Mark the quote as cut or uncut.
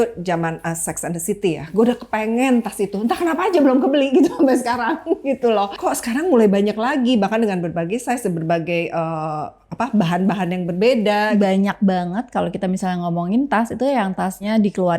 cut